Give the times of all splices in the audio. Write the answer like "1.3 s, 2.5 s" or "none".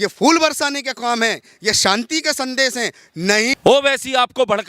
3.5 s